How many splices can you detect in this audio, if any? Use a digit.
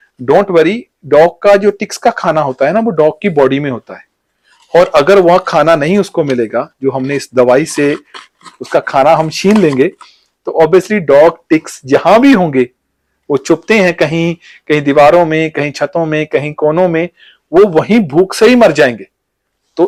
0